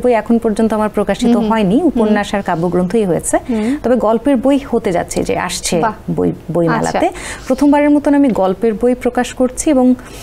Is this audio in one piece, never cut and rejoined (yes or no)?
yes